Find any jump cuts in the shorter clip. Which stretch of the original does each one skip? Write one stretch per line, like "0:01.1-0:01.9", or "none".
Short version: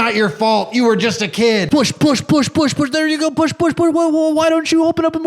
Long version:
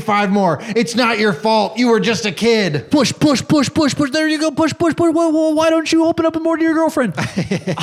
0:02.7-0:02.9